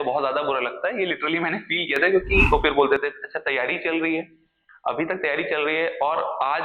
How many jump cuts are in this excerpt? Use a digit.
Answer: 1